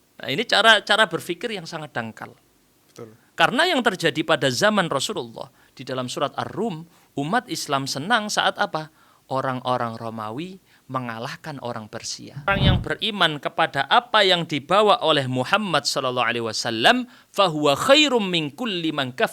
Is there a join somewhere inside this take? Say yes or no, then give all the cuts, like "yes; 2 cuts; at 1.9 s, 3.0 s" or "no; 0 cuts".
yes; 1 cut; at 12.5 s